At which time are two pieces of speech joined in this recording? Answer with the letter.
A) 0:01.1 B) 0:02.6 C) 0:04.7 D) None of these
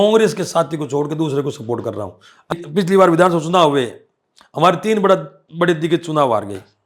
B